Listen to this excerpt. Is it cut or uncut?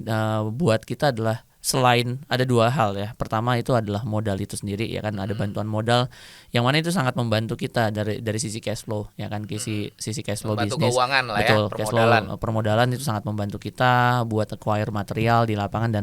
uncut